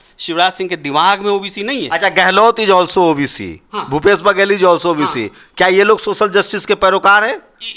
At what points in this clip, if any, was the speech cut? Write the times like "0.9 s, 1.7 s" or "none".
none